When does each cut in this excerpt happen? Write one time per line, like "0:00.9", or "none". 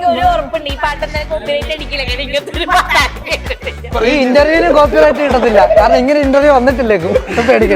0:03.9